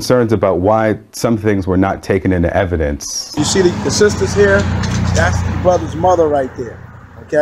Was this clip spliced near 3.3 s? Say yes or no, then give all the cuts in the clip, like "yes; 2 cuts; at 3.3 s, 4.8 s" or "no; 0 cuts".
yes; 1 cut; at 3.3 s